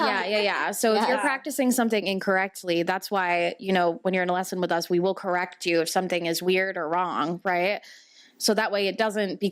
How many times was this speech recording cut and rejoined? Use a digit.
0